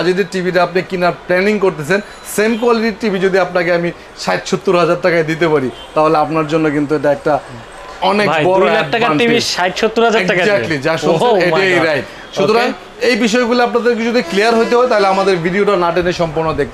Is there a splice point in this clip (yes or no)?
no